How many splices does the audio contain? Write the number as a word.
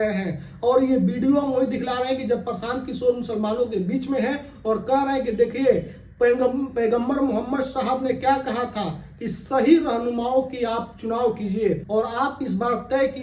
one